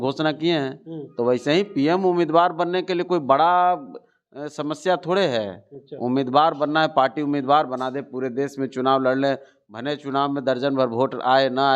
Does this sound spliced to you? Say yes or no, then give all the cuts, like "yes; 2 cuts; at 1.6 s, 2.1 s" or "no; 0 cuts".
no; 0 cuts